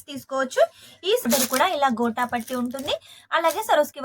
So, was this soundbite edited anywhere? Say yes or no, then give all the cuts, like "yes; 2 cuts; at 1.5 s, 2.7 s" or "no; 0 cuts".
yes; 1 cut; at 1.2 s